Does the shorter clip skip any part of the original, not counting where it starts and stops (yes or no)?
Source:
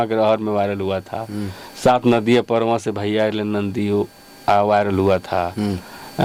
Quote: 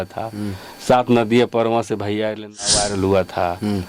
yes